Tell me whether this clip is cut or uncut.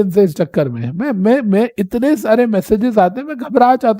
uncut